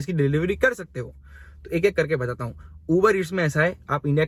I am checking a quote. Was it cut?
no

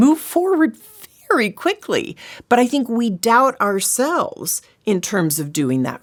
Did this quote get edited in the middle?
no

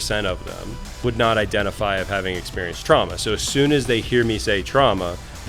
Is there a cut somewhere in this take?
yes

